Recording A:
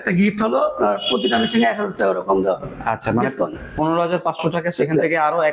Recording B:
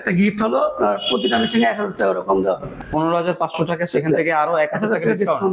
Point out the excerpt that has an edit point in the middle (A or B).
B